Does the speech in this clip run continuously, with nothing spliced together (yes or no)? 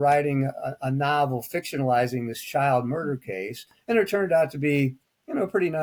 yes